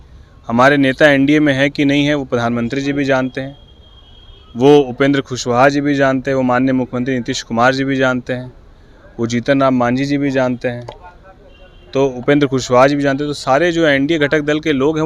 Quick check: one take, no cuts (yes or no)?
yes